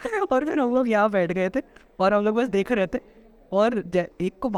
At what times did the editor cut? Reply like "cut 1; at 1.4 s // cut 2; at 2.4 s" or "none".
none